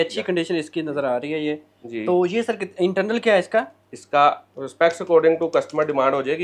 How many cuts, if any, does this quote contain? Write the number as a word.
zero